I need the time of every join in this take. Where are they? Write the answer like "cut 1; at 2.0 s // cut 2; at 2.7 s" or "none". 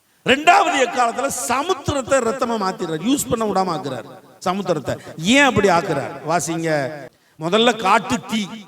cut 1; at 7.0 s